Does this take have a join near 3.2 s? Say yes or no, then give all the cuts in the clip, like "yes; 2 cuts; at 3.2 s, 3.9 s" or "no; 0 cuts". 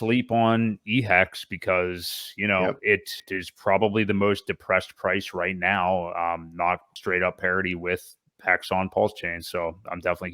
yes; 2 cuts; at 3.2 s, 6.9 s